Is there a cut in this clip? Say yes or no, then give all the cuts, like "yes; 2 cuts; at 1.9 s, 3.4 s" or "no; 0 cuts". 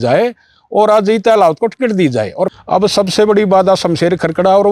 yes; 1 cut; at 2.6 s